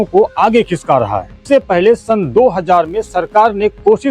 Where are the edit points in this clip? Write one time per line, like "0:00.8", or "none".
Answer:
0:01.4